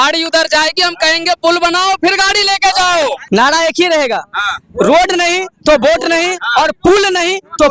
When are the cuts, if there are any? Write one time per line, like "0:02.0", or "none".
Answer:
0:03.2